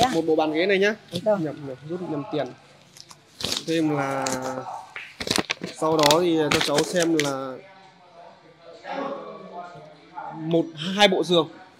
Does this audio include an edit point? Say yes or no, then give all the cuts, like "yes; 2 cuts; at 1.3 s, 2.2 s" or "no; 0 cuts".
no; 0 cuts